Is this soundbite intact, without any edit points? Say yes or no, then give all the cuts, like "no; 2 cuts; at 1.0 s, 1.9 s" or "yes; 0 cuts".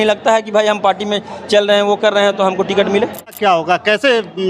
no; 1 cut; at 3.3 s